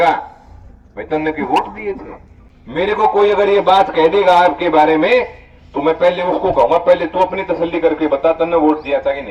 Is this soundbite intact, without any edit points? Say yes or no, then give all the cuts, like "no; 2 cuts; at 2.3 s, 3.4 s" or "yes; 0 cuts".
yes; 0 cuts